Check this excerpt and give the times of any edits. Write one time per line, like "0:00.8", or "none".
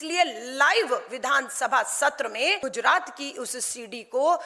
0:02.6